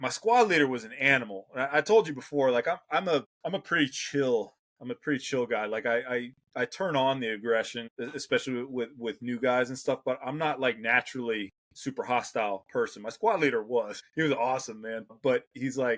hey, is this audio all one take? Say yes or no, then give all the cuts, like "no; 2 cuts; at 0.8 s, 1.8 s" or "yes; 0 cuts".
yes; 0 cuts